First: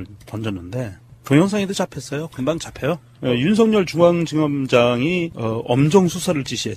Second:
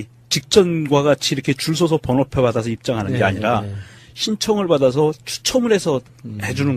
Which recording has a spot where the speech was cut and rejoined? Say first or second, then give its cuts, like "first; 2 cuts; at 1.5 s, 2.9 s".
second; 1 cut; at 1.4 s